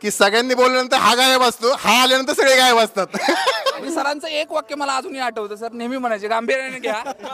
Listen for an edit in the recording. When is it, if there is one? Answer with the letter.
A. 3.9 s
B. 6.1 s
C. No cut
A